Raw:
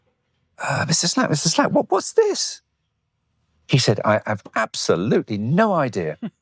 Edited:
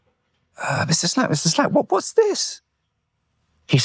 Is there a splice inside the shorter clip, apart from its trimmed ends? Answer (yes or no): no